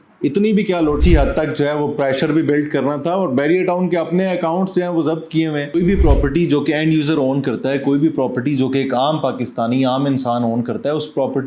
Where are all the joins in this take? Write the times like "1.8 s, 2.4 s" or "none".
1.0 s, 5.7 s